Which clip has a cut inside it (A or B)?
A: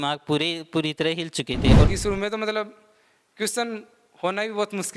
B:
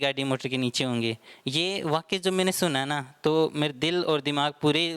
A